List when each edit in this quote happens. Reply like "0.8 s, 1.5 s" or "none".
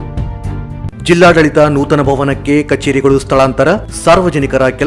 1.1 s